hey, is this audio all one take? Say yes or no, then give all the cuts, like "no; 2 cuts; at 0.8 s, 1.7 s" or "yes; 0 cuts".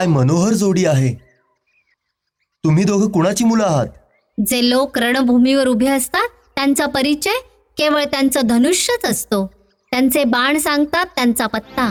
yes; 0 cuts